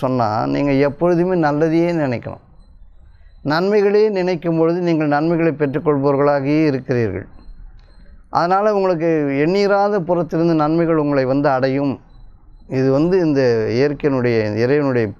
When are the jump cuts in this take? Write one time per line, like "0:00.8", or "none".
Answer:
none